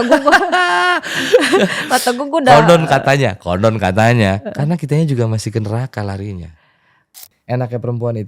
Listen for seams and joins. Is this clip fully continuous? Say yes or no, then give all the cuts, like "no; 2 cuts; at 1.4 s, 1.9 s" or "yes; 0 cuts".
no; 1 cut; at 7.3 s